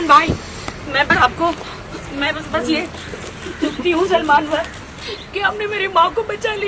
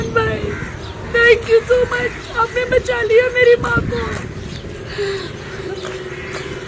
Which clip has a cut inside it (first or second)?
first